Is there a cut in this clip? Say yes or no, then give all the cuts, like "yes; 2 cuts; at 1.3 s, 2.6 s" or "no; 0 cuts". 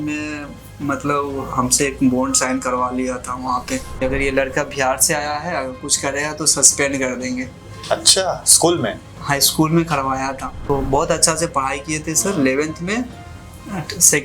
yes; 2 cuts; at 4.0 s, 10.5 s